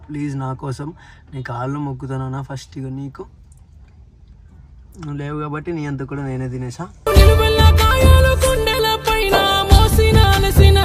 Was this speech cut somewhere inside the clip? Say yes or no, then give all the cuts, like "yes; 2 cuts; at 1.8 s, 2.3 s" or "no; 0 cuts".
no; 0 cuts